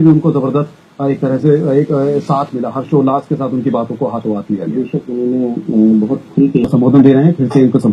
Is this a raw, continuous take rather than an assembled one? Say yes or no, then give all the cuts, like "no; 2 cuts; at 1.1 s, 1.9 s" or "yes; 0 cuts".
no; 1 cut; at 6.6 s